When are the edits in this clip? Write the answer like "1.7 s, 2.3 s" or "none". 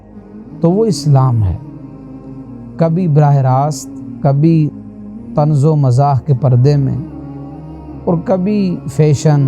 1.5 s, 2.8 s